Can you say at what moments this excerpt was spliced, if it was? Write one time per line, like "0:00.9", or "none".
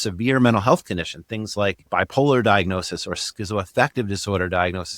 0:01.8